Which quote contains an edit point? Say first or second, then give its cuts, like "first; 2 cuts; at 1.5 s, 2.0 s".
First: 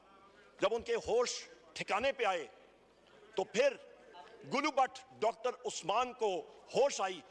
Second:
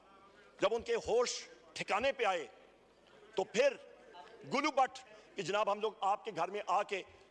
second; 1 cut; at 5.1 s